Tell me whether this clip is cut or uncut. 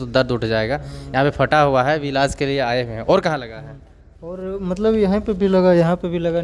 uncut